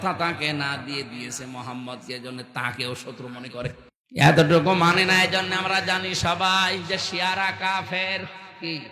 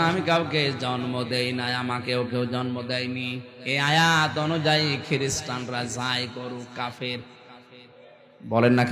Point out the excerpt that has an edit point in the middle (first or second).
first